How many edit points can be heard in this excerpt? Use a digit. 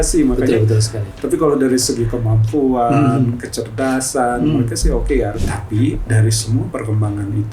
2